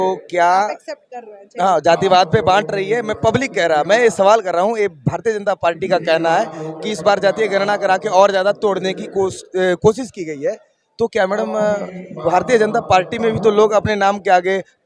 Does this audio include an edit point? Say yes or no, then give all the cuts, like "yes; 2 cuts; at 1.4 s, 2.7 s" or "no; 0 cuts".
no; 0 cuts